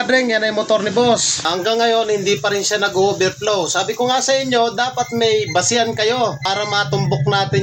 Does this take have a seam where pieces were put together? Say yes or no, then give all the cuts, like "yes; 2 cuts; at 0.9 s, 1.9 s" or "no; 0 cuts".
yes; 2 cuts; at 1.5 s, 6.4 s